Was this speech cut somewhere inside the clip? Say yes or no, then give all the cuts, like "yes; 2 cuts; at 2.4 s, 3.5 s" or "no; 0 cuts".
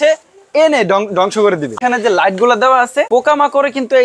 yes; 2 cuts; at 1.8 s, 3.1 s